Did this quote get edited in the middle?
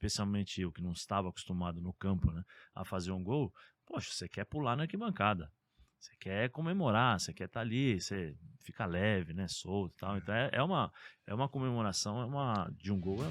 no; 0 cuts

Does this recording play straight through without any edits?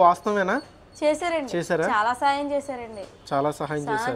yes; 0 cuts

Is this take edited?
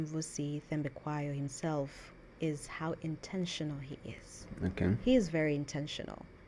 no; 0 cuts

